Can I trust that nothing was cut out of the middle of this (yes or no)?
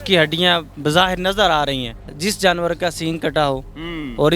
no